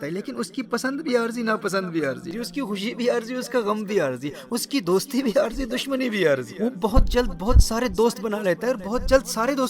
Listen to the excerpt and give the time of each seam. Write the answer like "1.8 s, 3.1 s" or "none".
2.3 s, 6.5 s